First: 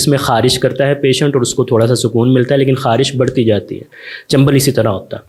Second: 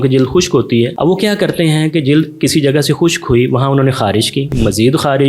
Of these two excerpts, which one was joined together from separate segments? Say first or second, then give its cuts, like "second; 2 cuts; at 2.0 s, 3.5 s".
second; 2 cuts; at 0.9 s, 4.5 s